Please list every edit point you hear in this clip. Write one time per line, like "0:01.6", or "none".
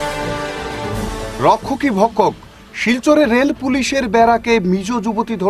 none